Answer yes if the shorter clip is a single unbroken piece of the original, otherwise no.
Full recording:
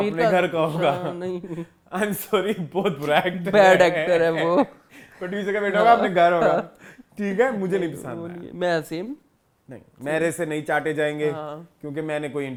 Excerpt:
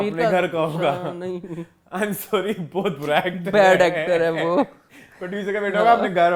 yes